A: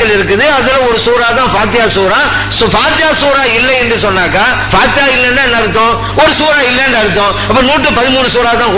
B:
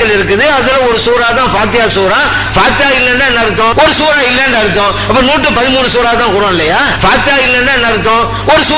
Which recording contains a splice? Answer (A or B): B